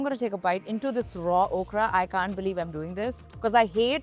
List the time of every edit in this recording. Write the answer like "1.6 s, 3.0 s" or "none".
none